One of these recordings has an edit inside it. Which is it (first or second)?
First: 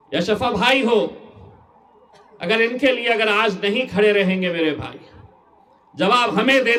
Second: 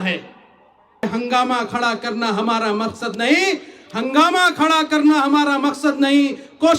second